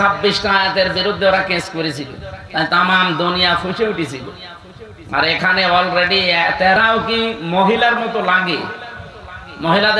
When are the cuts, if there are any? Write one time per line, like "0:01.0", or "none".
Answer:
0:06.8

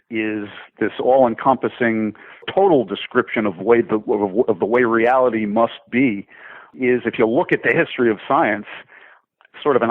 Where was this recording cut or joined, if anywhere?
0:02.5
0:06.7

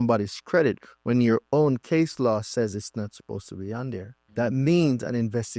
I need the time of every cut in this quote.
0:04.2

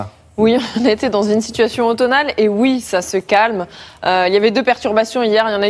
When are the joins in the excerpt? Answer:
0:02.0

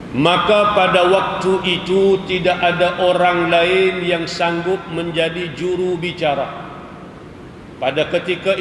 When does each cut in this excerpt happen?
none

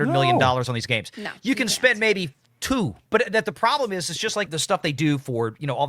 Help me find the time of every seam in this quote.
0:03.0
0:04.5

